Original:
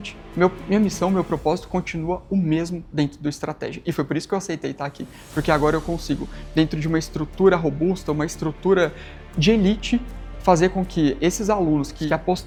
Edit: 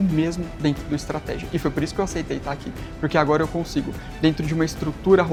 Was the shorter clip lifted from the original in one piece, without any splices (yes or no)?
yes